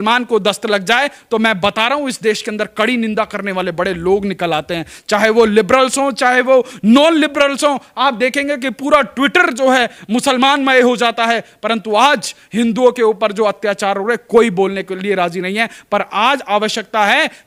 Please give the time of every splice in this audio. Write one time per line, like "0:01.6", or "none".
none

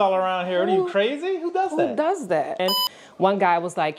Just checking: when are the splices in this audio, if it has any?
0:02.6

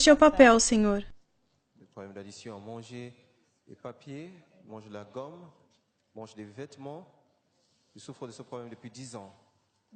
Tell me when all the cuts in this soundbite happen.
0:01.0

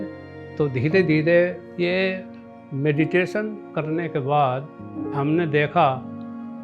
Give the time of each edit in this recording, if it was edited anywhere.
0:01.6

